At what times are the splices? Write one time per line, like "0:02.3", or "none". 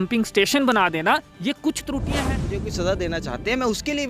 0:02.5